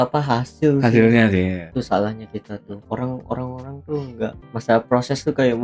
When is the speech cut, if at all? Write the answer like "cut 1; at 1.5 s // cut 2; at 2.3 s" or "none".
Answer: cut 1; at 1.6 s // cut 2; at 2.7 s // cut 3; at 4.4 s